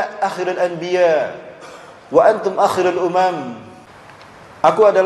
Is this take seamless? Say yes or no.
yes